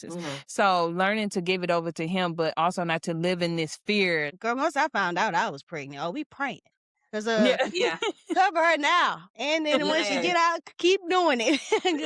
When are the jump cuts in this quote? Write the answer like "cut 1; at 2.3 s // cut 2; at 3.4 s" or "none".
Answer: cut 1; at 4.3 s